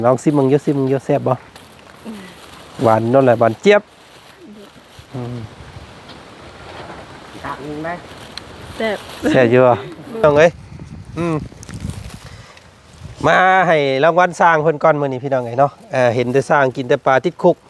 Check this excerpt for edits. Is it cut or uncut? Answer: cut